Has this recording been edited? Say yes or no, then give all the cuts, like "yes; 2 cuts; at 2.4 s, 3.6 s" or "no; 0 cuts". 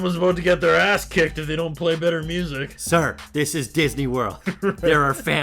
yes; 1 cut; at 2.8 s